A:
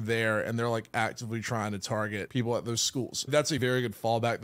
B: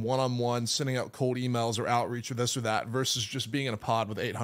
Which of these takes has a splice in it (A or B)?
A